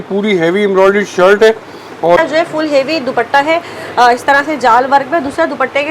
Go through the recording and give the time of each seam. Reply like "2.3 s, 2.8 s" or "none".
2.2 s